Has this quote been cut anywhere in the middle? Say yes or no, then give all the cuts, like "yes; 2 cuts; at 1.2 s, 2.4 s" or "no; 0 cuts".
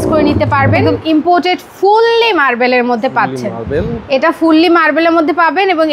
yes; 1 cut; at 0.9 s